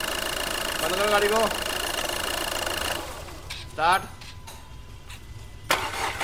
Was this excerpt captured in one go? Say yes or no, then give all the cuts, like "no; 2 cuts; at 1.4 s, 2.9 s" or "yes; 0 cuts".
yes; 0 cuts